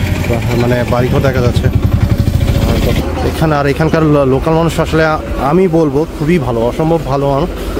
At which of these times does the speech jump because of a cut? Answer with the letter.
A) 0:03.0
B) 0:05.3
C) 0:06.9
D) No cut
A